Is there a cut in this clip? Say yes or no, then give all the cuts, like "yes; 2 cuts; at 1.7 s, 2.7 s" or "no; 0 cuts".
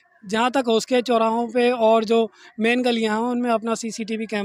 no; 0 cuts